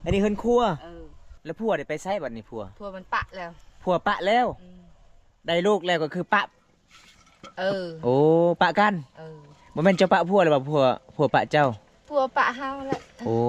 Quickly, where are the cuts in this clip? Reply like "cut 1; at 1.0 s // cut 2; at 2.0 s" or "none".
cut 1; at 1.4 s